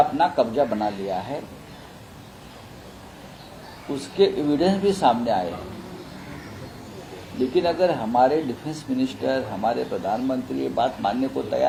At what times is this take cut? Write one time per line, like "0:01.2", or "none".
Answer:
none